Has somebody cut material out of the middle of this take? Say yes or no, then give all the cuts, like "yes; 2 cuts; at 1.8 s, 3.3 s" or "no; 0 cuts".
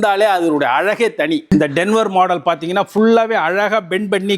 yes; 1 cut; at 1.5 s